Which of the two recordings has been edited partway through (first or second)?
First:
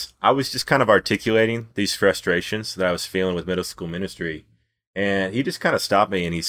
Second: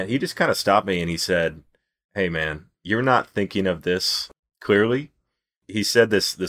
second